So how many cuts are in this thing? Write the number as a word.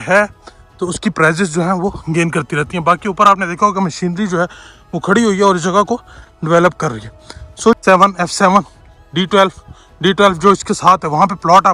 one